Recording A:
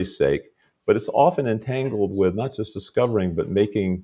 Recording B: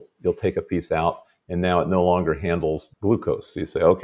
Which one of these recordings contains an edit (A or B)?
B